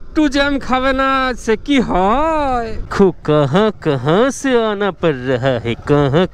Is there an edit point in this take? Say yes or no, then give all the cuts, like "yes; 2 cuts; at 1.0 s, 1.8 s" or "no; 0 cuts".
yes; 1 cut; at 2.9 s